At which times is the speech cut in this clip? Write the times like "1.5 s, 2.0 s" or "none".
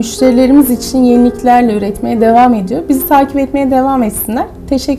none